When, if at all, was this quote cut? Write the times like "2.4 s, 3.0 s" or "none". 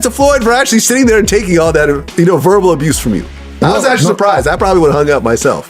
none

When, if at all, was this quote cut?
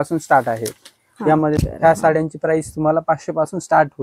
1.6 s

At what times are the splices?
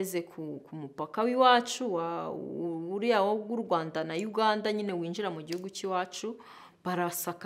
none

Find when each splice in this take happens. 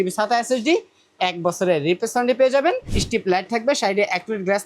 2.9 s

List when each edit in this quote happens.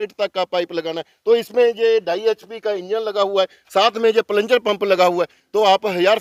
none

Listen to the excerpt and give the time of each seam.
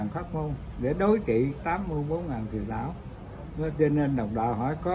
none

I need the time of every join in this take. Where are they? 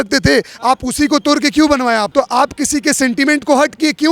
2.1 s

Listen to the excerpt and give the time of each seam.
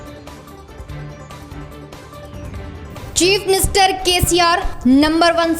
1.8 s

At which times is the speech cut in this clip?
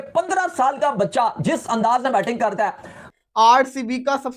3.0 s

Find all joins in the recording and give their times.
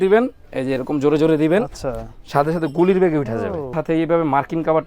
3.7 s

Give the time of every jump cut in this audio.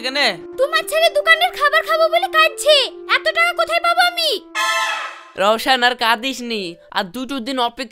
none

